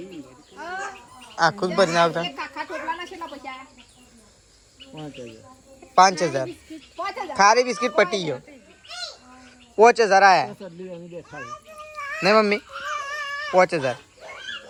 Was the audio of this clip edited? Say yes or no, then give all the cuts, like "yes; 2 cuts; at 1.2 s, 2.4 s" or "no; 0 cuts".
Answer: no; 0 cuts